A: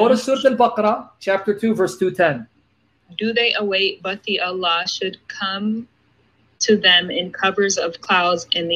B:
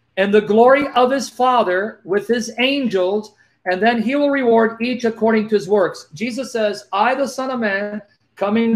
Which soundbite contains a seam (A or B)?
A